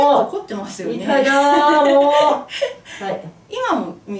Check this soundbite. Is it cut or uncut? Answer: uncut